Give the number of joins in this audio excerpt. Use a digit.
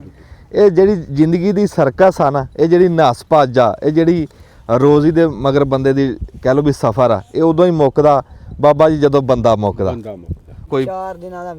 1